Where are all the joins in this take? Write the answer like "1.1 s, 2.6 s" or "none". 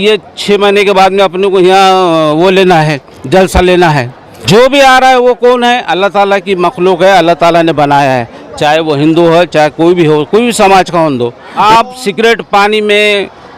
4.3 s, 11.5 s

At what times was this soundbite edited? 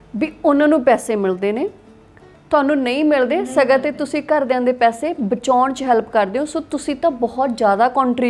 none

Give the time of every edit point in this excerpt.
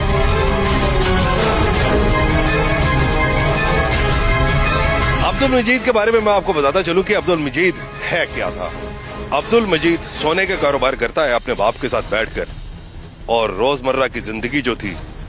none

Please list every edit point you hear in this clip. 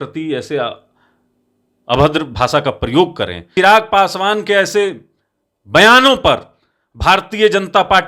3.5 s

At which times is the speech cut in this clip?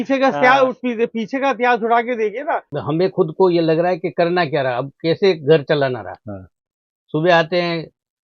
2.7 s

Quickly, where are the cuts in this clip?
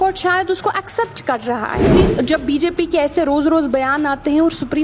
1.9 s

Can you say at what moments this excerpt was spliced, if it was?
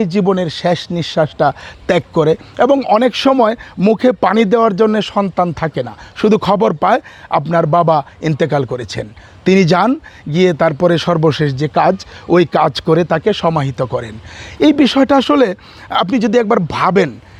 none

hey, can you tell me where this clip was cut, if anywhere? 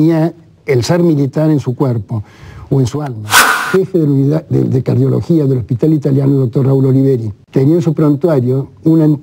3.6 s, 7.3 s

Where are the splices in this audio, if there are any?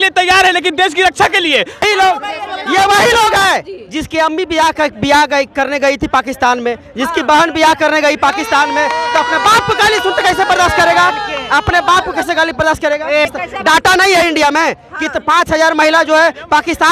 1.8 s, 13.3 s

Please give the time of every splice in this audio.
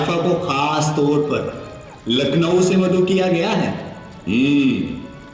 none

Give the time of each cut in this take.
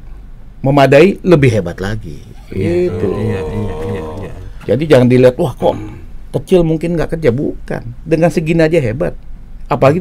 none

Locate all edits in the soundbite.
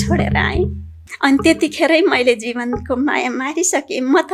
0.9 s

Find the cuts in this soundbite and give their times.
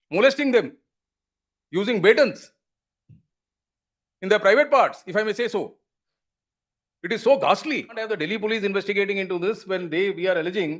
8.2 s

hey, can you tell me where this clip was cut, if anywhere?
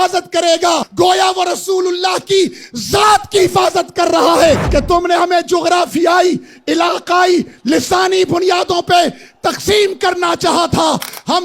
0.9 s, 4.6 s

